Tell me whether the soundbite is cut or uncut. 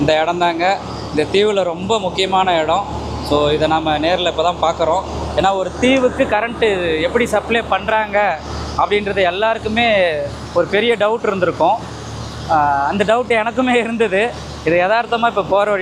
uncut